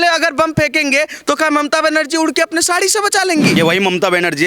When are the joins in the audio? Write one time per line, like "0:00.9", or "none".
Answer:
0:03.6